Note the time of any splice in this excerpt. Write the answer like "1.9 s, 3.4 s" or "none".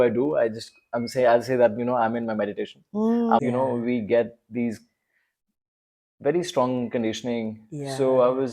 3.4 s